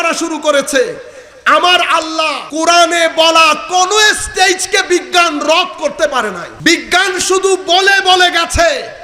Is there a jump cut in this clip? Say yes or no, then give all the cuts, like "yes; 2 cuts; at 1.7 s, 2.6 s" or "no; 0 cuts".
yes; 2 cuts; at 2.4 s, 6.5 s